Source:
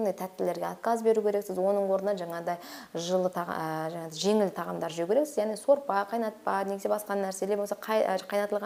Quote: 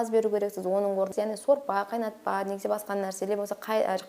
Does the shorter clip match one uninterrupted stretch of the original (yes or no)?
no